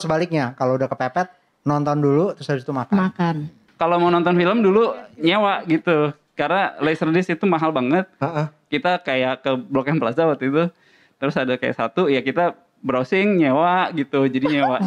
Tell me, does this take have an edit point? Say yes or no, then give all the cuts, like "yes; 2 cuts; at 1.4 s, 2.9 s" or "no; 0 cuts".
yes; 1 cut; at 3.6 s